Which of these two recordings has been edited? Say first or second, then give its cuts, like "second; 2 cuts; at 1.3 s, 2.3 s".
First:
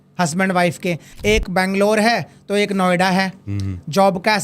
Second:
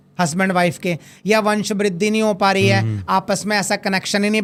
first; 1 cut; at 1.1 s